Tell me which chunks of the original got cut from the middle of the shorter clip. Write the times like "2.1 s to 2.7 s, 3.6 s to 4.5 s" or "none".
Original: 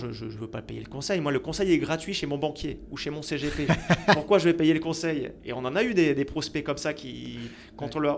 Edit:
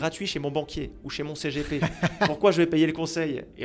none